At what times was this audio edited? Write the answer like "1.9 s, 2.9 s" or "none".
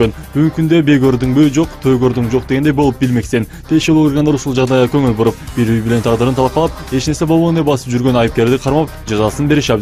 1.8 s